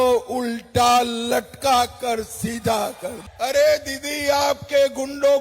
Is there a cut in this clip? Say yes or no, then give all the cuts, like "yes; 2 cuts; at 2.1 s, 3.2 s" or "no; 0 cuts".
yes; 1 cut; at 3.2 s